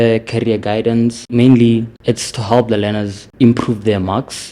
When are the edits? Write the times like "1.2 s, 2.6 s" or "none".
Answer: 1.3 s, 1.9 s, 3.2 s